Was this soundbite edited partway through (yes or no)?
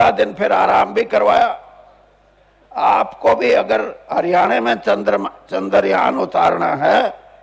no